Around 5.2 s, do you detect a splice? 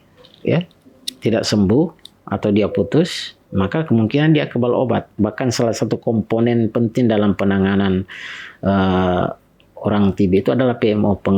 yes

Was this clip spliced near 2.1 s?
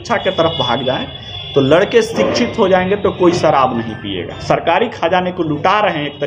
no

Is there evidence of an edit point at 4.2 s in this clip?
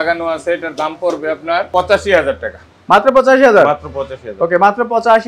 no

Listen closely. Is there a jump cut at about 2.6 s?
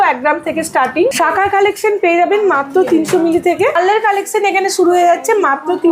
no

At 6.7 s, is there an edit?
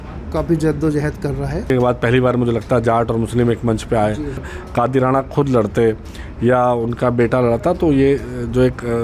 no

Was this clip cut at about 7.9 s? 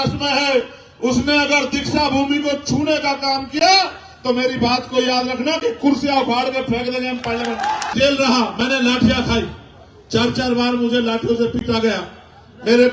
yes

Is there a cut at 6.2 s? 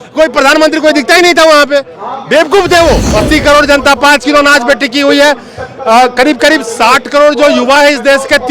no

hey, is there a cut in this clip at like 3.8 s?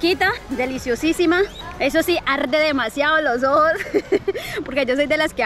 no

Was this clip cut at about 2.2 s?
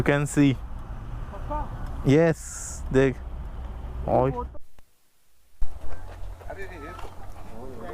no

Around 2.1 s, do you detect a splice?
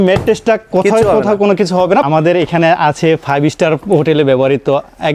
yes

